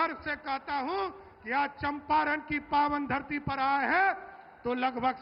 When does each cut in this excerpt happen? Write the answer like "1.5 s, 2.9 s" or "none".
none